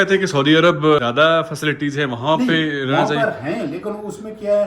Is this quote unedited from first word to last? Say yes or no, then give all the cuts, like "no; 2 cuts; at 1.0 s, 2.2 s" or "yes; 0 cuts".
no; 1 cut; at 1.0 s